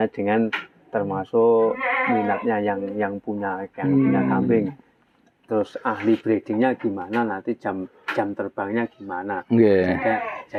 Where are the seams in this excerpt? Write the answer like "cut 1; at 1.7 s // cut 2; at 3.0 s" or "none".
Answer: none